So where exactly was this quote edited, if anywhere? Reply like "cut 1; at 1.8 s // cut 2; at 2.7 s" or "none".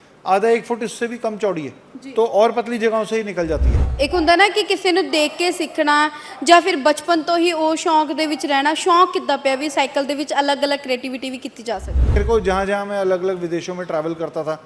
cut 1; at 3.8 s // cut 2; at 12.2 s